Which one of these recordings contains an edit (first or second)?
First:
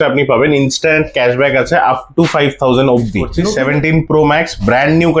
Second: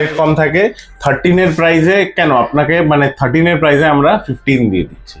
first